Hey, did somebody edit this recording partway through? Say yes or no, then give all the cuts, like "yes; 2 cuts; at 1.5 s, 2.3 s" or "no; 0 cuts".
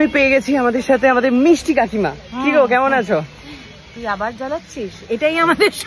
no; 0 cuts